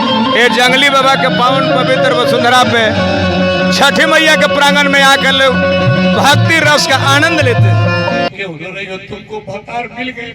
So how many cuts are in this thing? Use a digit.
1